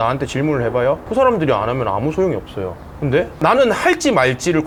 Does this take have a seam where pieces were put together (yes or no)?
no